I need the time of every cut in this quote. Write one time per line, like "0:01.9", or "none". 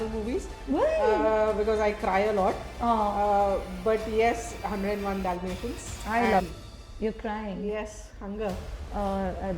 0:06.4